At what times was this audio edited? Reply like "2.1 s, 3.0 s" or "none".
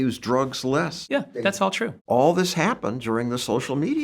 1.5 s